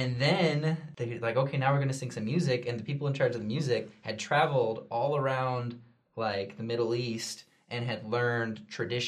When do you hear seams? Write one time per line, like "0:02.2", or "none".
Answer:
0:00.9